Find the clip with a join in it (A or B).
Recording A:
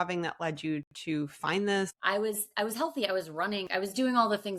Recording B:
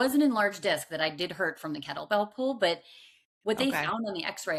A